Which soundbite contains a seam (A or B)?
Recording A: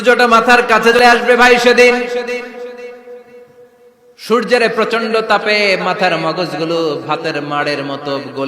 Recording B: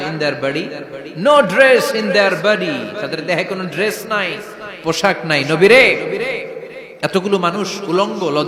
A